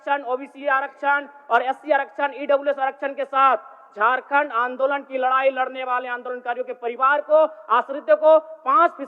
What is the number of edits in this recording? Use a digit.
0